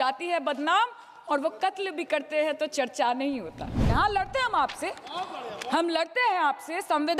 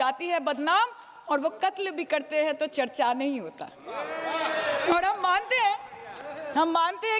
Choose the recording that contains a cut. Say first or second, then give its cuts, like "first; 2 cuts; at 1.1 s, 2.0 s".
first; 1 cut; at 3.8 s